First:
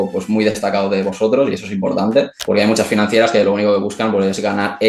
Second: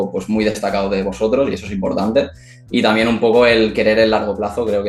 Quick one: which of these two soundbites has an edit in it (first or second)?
first